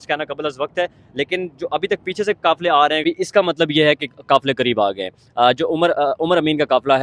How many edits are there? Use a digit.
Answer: 1